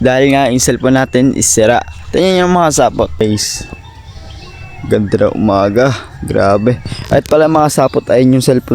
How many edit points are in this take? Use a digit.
1